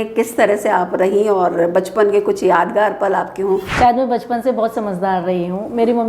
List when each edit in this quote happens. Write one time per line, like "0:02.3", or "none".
0:03.7